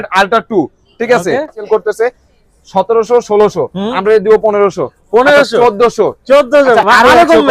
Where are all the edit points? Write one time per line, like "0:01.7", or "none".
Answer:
0:01.6